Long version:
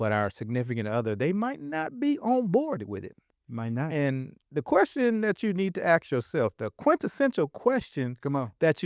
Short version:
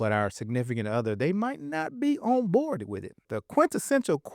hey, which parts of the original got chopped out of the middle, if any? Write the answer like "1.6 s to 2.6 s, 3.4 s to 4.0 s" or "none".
3.4 s to 6.7 s